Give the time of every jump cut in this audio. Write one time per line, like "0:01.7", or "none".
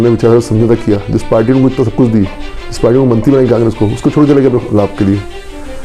none